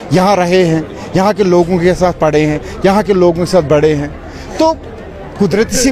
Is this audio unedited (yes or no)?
yes